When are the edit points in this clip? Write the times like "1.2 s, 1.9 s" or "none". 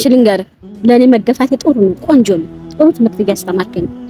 none